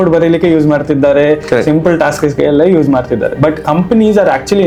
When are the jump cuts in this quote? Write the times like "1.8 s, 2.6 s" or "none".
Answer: none